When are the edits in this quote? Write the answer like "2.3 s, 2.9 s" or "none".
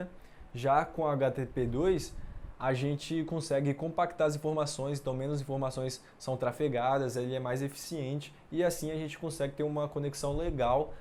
none